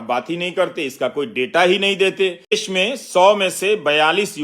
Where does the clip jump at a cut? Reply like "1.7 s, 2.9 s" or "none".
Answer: 2.5 s